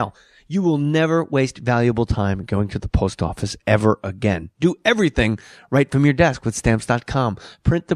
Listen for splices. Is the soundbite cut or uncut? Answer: uncut